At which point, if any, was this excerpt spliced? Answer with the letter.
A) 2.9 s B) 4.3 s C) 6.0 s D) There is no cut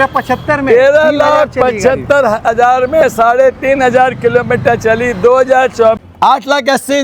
C